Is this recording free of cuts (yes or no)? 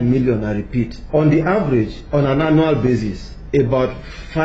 no